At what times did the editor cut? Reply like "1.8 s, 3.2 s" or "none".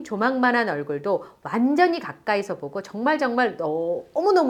none